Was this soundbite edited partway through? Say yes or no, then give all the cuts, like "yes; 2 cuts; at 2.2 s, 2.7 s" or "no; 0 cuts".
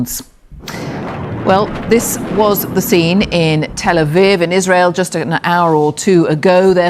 yes; 1 cut; at 4.5 s